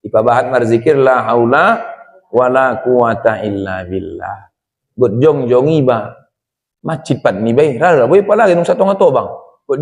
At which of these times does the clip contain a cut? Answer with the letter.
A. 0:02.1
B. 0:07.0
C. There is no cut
C